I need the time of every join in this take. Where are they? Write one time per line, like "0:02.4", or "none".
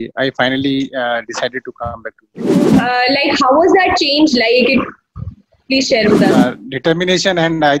0:02.7
0:06.4